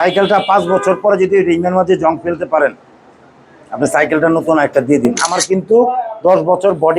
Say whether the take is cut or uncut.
cut